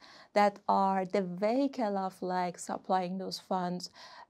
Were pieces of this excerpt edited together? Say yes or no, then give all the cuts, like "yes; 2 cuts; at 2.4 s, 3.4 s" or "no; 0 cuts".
no; 0 cuts